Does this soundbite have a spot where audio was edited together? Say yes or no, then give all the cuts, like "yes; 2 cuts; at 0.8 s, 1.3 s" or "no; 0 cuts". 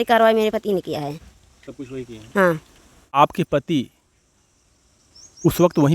yes; 1 cut; at 3.1 s